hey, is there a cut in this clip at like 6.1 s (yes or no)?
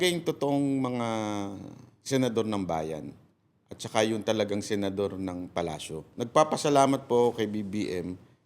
yes